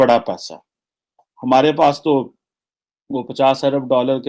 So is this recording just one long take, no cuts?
yes; 0 cuts

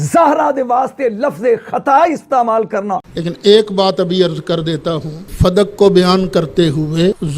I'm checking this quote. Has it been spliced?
yes; 1 cut; at 3.0 s

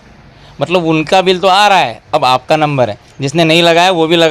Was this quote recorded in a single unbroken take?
yes; 0 cuts

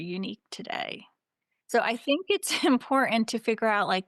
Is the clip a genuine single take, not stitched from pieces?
yes; 0 cuts

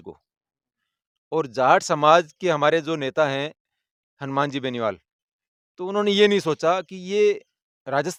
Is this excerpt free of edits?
yes; 0 cuts

